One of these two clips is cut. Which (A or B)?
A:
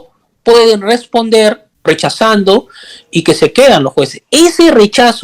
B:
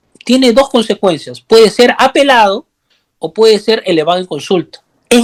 A